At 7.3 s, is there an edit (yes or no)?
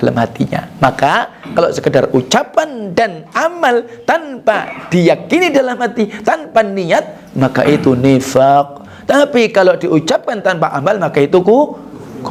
no